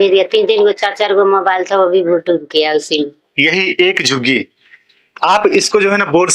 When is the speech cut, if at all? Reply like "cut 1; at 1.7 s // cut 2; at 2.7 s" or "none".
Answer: cut 1; at 3.2 s